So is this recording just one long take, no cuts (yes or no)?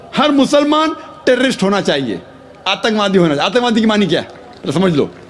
yes